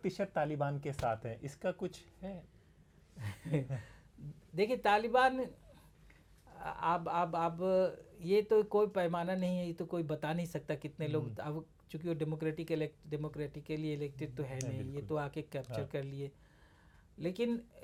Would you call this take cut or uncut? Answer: uncut